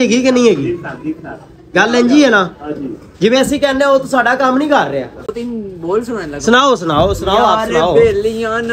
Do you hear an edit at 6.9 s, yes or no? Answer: no